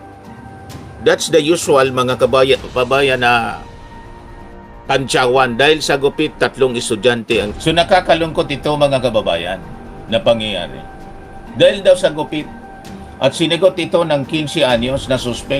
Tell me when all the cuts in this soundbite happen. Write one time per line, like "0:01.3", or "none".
0:07.5